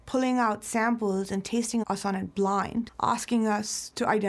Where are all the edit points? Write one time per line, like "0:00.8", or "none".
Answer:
0:01.8
0:02.9